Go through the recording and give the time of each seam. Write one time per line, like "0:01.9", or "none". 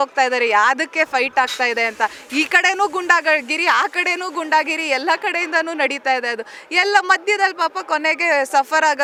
none